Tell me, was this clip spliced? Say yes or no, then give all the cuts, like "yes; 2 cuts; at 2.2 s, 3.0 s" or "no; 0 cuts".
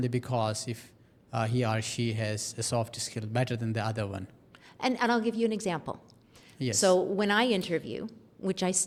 no; 0 cuts